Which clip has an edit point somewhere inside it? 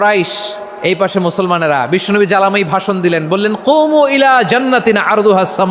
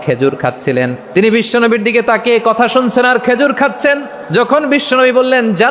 second; 2 cuts; at 1.0 s, 4.1 s

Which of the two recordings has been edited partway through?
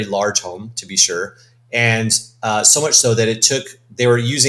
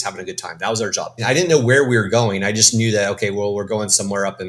second; 1 cut; at 1.2 s

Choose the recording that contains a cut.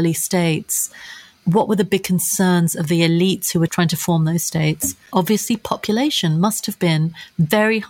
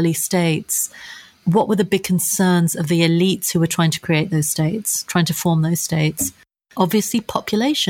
first; 2 cuts; at 3.7 s, 4.9 s

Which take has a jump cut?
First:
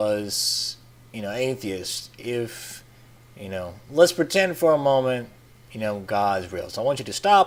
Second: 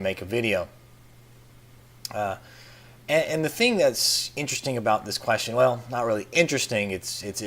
second; 1 cut; at 5.9 s

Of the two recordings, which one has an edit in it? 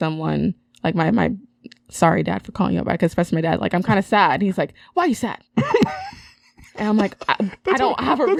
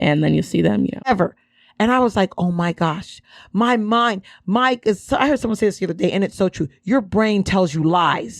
second; 1 cut; at 1.1 s

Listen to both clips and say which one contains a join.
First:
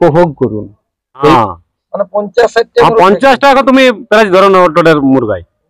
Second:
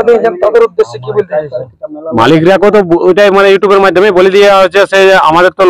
first; 1 cut; at 1.3 s

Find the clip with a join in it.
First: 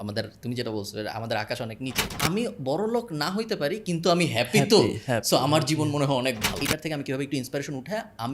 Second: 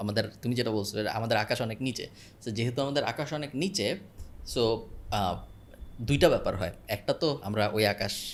first; 2 cuts; at 2.2 s, 6.6 s

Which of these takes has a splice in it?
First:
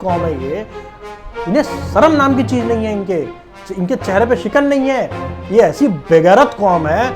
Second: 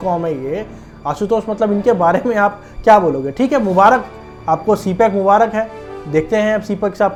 first; 1 cut; at 1.0 s

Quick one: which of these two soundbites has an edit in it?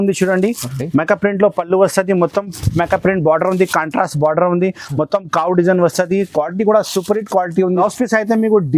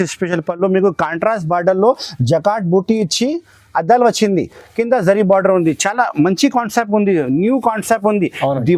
first; 1 cut; at 7.8 s

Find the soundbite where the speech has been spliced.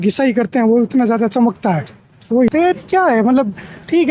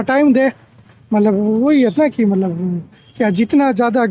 first; 1 cut; at 2.5 s

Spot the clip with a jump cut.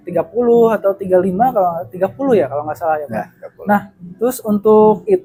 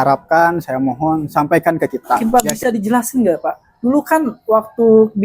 second; 1 cut; at 2.2 s

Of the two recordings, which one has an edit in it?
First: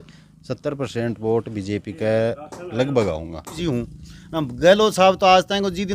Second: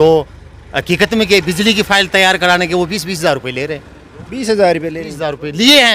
first; 1 cut; at 3.6 s

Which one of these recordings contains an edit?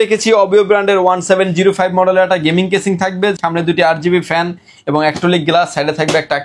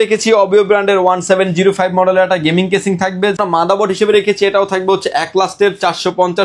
second; 1 cut; at 3.4 s

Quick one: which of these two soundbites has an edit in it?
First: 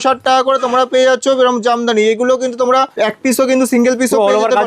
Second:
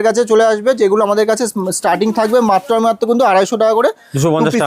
first; 1 cut; at 2.9 s

